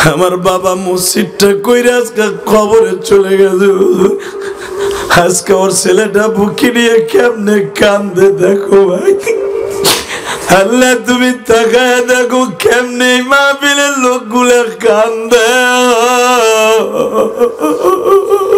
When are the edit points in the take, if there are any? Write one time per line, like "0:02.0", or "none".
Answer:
none